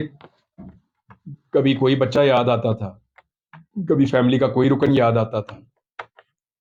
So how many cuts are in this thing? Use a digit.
0